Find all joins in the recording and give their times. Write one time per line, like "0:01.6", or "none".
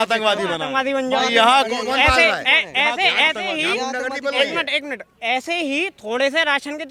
none